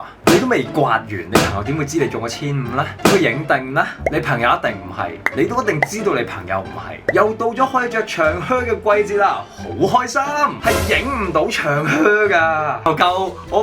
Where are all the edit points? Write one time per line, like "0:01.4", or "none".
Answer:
0:07.0
0:10.6
0:12.8